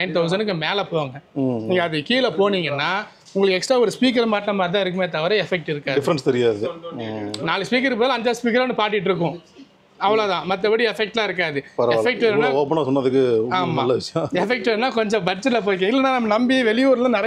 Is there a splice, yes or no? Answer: no